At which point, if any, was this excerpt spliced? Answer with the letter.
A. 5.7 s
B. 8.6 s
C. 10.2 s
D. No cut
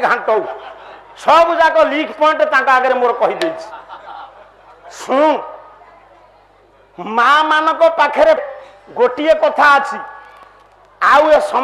B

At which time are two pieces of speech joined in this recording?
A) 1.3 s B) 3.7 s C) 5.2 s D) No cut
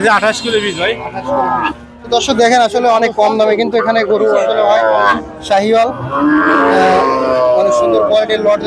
C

